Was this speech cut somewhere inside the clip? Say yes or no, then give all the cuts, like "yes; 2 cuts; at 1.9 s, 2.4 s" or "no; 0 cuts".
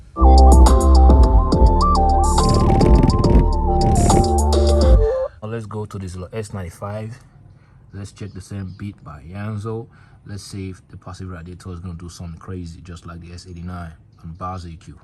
yes; 1 cut; at 5.4 s